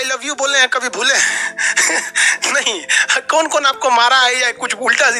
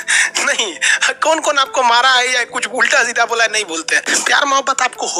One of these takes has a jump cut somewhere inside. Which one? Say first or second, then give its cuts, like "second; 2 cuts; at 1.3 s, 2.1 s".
second; 1 cut; at 4.0 s